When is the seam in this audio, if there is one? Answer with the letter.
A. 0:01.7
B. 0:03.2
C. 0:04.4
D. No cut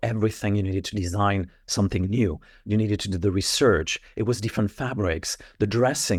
D